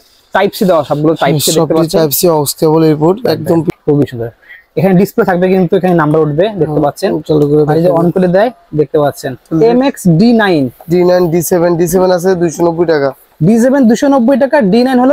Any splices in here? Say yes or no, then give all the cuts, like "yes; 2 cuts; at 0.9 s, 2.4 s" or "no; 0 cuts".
yes; 2 cuts; at 3.7 s, 9.4 s